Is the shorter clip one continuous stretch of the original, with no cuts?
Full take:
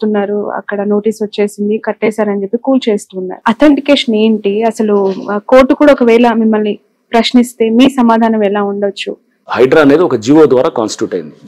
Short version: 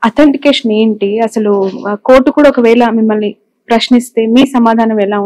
yes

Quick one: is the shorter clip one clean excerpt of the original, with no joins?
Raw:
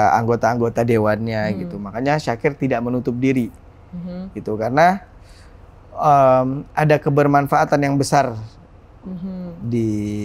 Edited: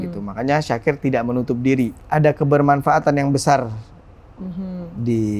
no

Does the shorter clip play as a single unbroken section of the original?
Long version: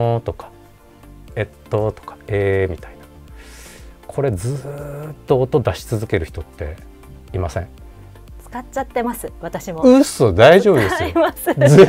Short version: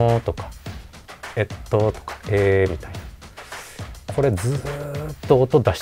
yes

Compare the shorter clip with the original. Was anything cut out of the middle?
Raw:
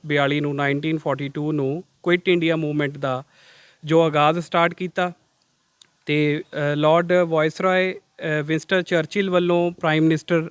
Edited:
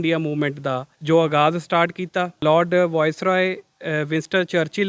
yes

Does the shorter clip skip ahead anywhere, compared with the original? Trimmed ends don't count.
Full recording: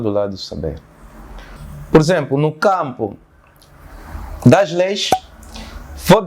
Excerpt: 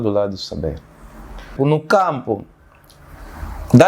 yes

